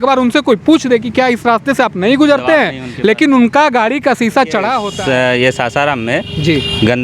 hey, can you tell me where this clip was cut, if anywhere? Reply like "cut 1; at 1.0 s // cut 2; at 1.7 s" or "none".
cut 1; at 4.9 s